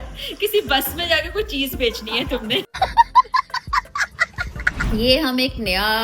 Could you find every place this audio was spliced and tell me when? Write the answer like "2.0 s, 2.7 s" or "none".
4.7 s